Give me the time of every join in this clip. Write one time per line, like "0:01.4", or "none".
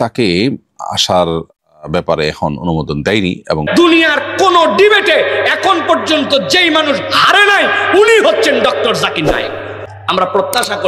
0:03.7
0:09.4